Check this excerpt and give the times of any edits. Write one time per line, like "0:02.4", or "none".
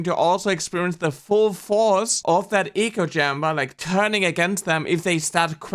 0:02.1